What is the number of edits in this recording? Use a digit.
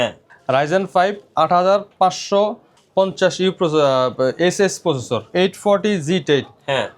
1